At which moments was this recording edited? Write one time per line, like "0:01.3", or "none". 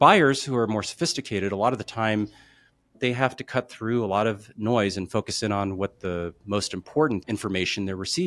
0:02.9
0:07.2